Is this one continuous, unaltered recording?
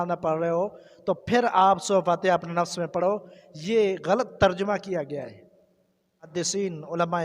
no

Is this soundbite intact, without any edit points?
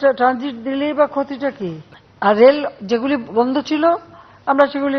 yes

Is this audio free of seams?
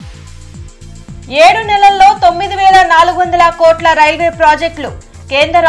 no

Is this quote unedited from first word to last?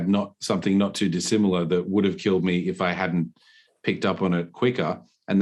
yes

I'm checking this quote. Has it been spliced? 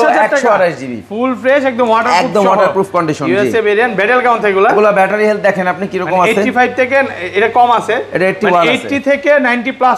no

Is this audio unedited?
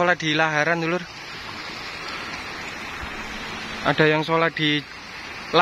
yes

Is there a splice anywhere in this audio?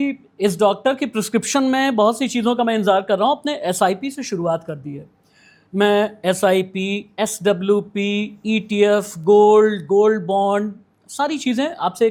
no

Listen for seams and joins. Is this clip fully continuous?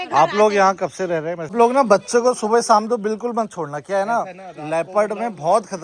no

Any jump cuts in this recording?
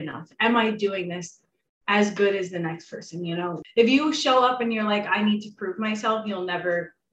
yes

